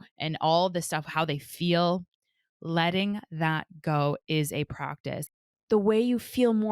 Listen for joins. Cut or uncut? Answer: cut